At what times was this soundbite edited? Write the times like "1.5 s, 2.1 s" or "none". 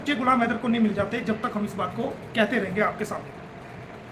none